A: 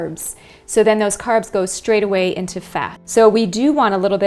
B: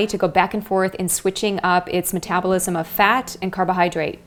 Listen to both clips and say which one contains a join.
A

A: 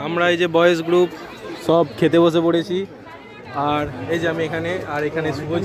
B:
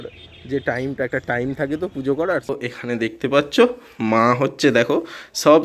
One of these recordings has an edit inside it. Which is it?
B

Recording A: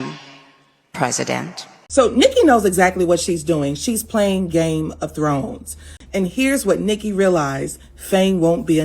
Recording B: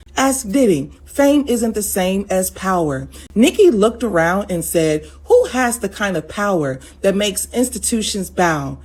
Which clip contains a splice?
A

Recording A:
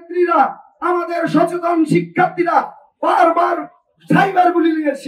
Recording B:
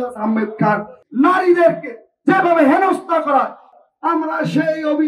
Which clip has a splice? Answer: B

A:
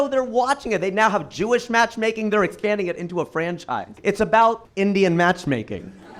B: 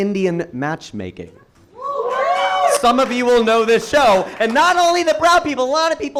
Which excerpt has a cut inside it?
A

